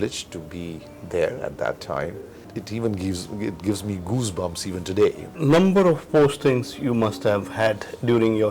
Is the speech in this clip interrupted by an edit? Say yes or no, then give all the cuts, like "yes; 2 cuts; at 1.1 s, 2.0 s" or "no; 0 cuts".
yes; 2 cuts; at 2.4 s, 5.3 s